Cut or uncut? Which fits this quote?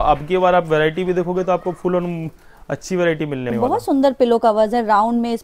cut